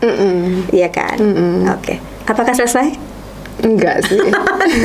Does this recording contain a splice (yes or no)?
no